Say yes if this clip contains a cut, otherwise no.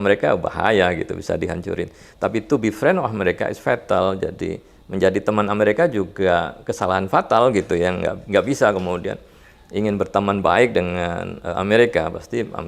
no